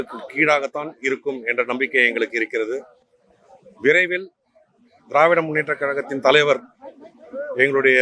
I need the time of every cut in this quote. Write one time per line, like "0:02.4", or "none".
none